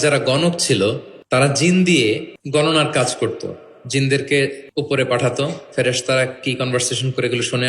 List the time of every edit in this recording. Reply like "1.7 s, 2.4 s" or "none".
1.1 s, 2.3 s, 4.6 s